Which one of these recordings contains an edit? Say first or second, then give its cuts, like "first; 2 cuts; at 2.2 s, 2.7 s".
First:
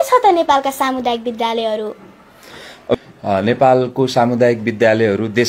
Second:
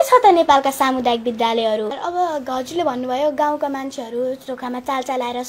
second; 1 cut; at 2.0 s